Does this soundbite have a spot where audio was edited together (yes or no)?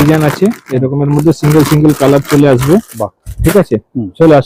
no